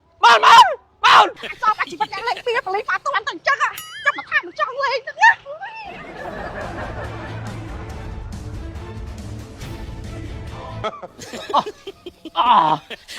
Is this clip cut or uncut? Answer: cut